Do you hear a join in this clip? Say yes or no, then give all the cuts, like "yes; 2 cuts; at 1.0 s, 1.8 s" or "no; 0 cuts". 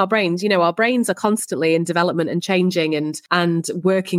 yes; 1 cut; at 3.2 s